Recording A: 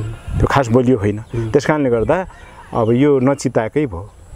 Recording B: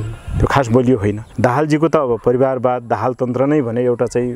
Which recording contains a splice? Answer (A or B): B